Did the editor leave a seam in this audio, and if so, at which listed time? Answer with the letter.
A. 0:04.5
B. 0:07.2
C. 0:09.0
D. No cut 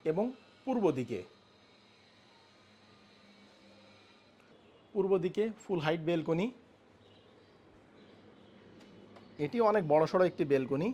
A